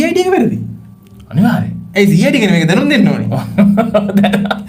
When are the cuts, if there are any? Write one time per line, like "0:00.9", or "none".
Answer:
none